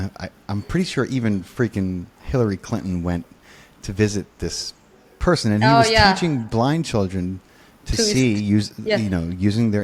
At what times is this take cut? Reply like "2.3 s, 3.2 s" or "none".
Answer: none